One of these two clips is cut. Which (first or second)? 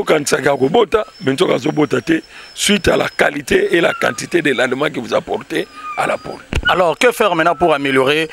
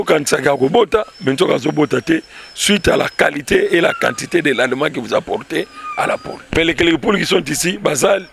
second